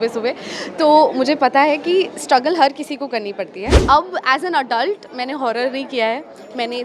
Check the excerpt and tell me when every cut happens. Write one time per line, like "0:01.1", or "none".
0:03.8